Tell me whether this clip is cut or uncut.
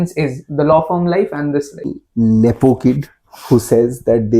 cut